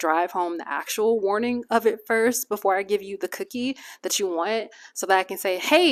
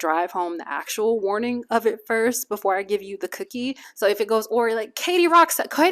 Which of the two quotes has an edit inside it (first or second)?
second